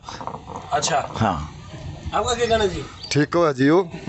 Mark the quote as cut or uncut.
uncut